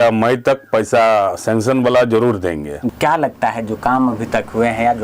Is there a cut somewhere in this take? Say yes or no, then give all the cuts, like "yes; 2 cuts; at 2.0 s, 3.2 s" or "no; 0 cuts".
yes; 1 cut; at 2.9 s